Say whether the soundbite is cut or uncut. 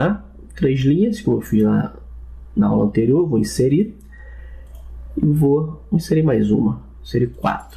uncut